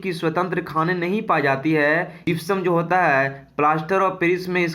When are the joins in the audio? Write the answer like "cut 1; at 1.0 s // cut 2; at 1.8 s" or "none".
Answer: cut 1; at 2.2 s